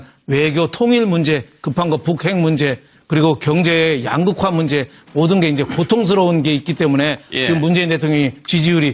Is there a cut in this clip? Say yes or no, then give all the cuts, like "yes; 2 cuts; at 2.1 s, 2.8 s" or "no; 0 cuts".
no; 0 cuts